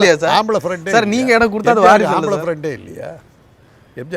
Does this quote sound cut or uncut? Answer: uncut